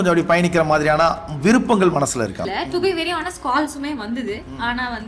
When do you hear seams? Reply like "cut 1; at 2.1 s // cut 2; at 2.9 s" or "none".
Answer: cut 1; at 2.4 s